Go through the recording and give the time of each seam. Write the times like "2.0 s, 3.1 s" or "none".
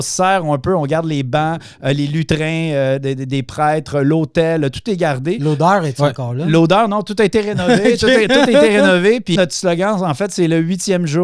9.3 s